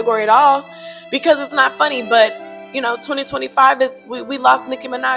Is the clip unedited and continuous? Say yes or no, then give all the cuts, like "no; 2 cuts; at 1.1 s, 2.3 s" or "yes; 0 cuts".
yes; 0 cuts